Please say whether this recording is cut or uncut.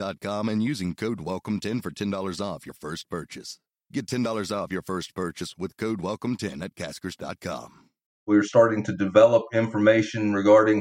cut